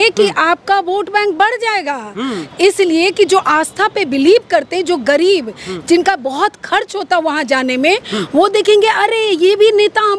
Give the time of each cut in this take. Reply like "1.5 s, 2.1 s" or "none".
none